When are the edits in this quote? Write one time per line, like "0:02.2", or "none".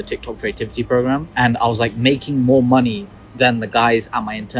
0:01.3